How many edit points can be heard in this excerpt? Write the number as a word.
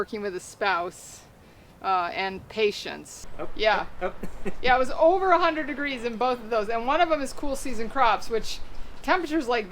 one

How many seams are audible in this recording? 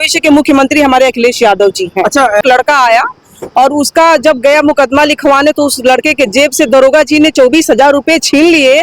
one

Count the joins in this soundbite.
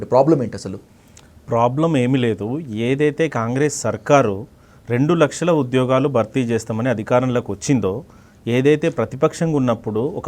zero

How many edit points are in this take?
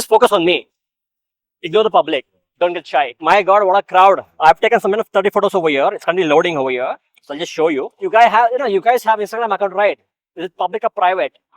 two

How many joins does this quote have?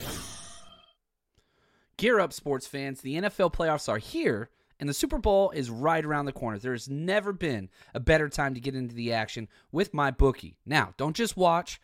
one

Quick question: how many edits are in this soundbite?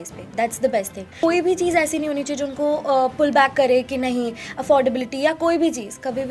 one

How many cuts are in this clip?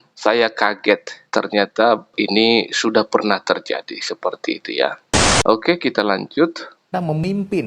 one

